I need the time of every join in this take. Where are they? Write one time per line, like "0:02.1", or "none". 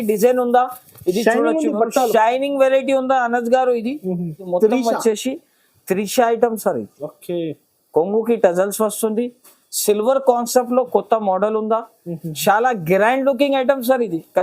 0:04.4